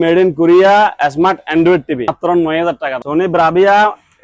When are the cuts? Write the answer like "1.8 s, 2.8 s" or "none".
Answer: 2.1 s, 3.0 s